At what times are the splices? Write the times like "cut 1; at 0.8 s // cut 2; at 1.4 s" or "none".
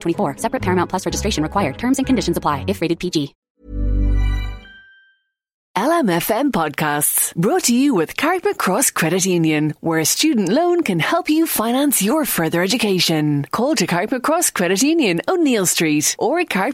cut 1; at 5.6 s